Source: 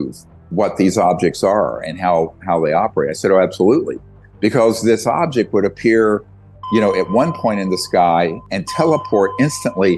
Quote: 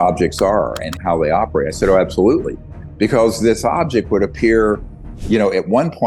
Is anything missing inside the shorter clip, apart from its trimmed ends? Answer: yes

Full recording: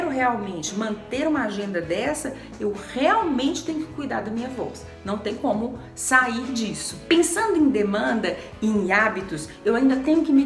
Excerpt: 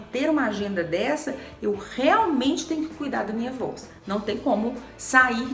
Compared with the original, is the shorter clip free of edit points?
yes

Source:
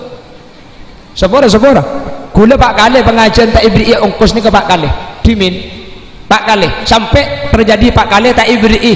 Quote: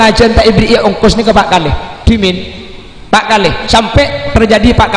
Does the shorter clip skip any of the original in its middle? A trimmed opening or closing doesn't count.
no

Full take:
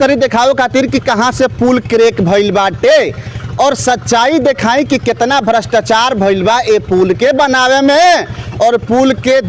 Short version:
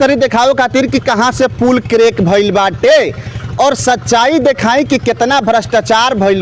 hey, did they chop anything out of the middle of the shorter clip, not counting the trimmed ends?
no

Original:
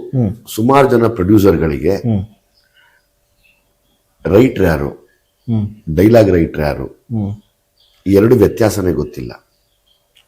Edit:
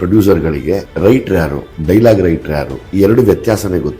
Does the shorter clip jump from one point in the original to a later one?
yes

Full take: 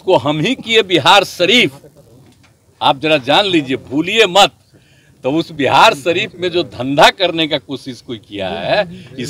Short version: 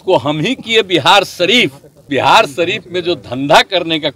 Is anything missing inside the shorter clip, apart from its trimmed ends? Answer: yes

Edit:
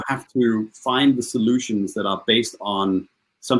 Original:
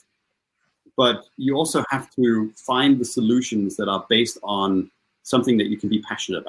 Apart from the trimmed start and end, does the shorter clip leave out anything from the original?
no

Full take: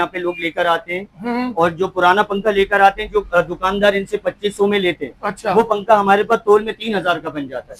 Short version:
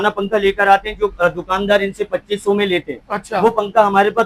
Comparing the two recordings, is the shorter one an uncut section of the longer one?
yes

